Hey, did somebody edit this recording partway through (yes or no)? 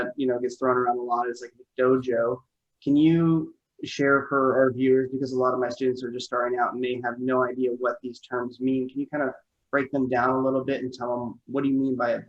no